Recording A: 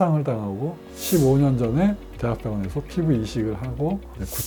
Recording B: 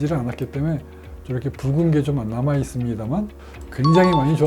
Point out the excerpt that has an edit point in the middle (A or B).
B